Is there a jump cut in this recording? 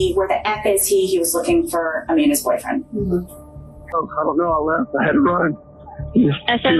yes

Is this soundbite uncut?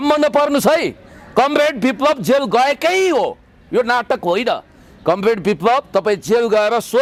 yes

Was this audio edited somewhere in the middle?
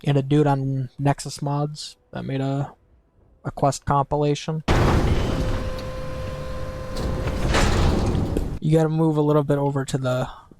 yes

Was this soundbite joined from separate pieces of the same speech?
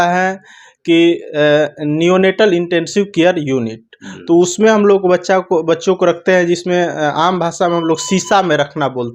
no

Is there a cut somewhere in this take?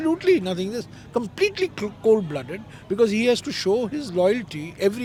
no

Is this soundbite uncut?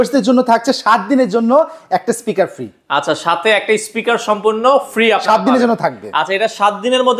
yes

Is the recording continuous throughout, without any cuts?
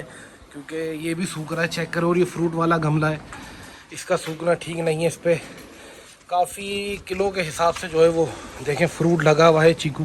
yes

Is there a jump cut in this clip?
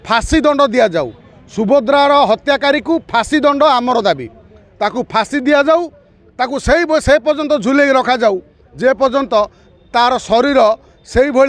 no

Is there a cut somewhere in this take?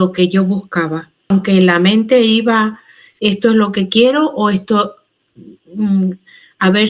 yes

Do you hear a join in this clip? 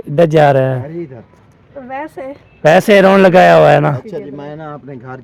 no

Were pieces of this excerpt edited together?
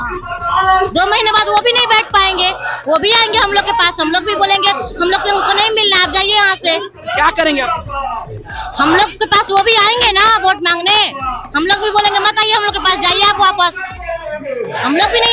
no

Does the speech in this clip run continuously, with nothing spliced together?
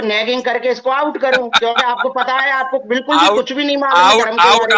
yes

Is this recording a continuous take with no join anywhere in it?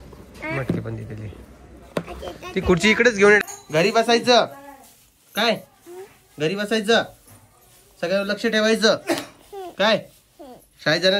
no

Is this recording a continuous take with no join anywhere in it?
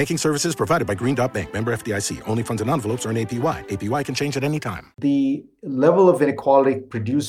no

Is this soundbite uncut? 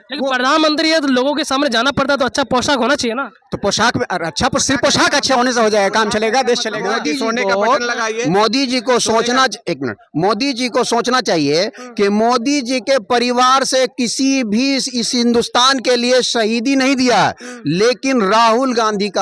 yes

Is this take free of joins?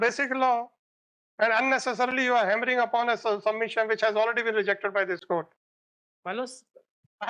yes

